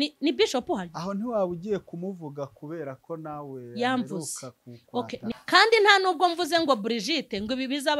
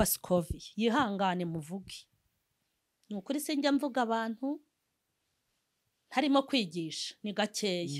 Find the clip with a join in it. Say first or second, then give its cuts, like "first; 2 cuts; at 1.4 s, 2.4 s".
first; 1 cut; at 5.3 s